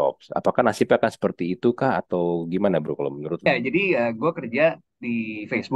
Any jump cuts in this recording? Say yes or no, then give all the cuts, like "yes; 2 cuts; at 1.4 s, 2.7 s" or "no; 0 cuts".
yes; 1 cut; at 3.5 s